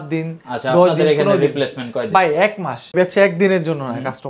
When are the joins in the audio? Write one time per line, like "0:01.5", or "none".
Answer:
0:02.9